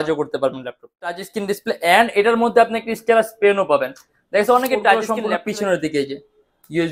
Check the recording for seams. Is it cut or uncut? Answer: cut